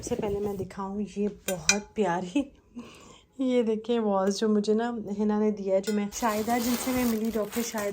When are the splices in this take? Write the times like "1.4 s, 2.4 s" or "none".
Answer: 6.1 s